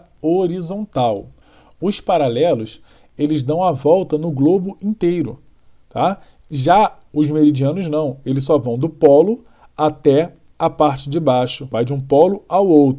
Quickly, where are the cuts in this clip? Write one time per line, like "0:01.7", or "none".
0:01.3
0:11.7